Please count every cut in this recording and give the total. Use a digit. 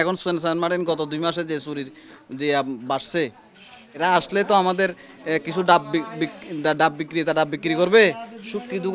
1